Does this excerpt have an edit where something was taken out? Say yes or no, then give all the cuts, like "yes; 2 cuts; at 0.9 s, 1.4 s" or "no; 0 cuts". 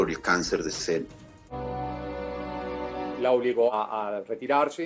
yes; 2 cuts; at 1.5 s, 3.7 s